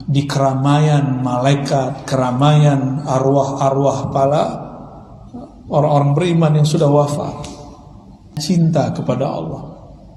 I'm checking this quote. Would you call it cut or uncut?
cut